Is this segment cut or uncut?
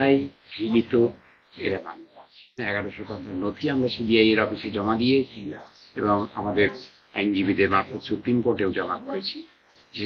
cut